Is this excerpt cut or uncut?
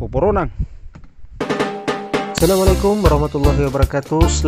cut